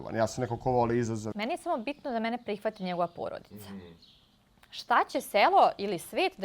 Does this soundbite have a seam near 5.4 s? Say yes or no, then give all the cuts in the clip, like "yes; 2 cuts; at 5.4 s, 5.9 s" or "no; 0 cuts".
no; 1 cut; at 1.3 s